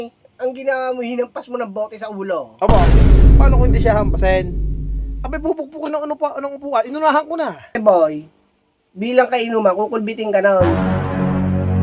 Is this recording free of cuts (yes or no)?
no